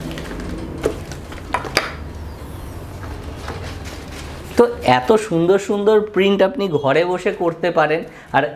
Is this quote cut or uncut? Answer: uncut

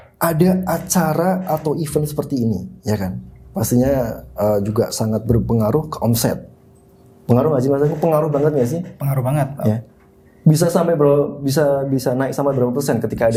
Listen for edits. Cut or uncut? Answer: uncut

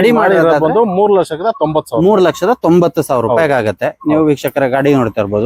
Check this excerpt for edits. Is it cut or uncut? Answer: uncut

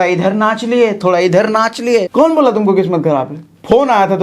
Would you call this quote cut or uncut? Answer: cut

